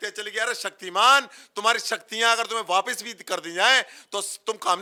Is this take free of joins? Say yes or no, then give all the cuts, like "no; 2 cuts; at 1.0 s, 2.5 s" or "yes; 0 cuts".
yes; 0 cuts